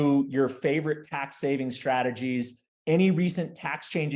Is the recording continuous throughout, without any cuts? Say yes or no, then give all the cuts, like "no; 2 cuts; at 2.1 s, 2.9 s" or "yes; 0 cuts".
yes; 0 cuts